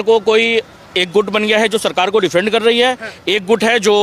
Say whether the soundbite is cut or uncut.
uncut